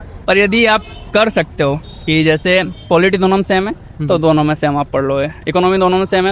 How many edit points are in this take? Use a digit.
0